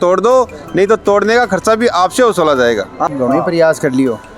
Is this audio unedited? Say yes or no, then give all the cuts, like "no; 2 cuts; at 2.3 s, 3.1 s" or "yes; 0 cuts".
no; 1 cut; at 2.9 s